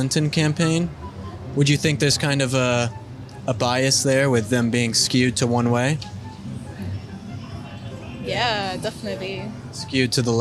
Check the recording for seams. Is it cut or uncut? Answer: uncut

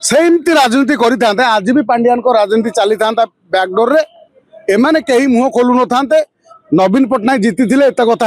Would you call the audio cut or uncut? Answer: uncut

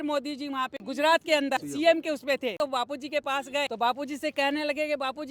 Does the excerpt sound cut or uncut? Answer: cut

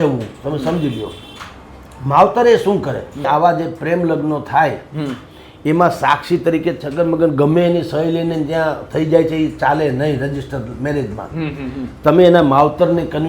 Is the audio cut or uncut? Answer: cut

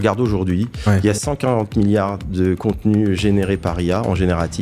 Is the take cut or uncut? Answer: uncut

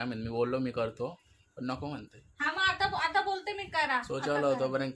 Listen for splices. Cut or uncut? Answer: uncut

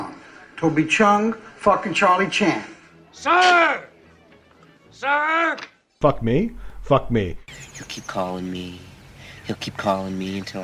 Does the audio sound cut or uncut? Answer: cut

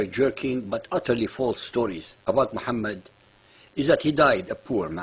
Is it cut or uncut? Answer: uncut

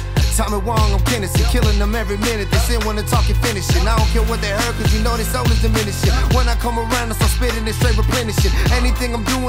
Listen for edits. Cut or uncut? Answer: uncut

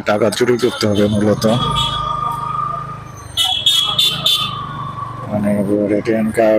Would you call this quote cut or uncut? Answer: uncut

